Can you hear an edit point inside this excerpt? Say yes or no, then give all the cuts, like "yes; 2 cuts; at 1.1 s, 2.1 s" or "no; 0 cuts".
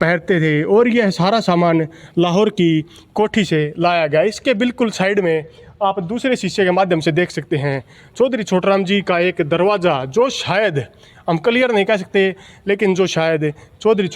no; 0 cuts